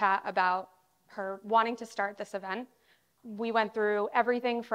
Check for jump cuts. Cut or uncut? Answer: cut